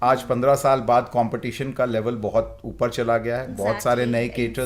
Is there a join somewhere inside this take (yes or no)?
no